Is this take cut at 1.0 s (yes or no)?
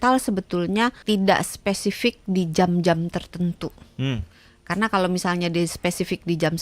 yes